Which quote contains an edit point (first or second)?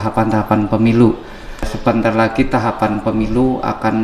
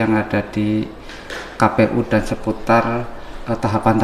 first